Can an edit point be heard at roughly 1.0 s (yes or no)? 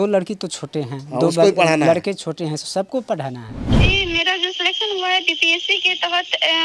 no